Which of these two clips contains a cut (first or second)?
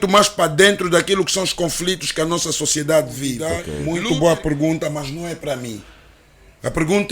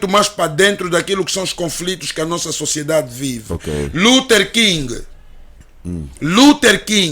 first